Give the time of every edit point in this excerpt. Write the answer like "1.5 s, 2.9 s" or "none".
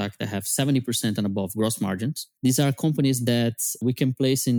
2.2 s, 3.8 s